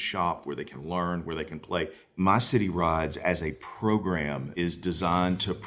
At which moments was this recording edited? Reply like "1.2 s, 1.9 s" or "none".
2.2 s, 4.5 s